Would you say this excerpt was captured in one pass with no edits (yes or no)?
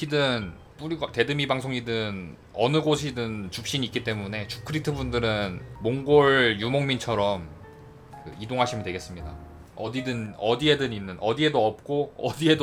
yes